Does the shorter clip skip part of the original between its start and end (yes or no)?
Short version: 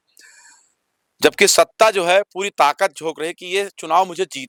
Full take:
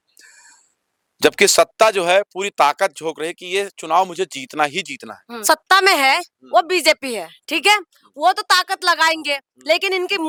no